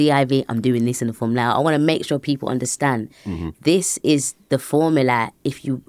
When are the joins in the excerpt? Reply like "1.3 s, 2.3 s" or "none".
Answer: none